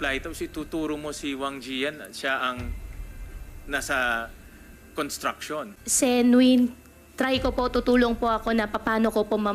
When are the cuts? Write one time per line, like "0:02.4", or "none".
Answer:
0:05.8